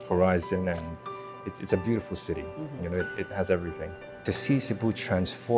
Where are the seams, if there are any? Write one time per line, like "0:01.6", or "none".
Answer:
0:04.2